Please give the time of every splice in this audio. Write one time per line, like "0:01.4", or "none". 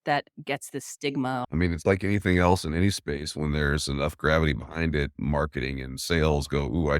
0:01.4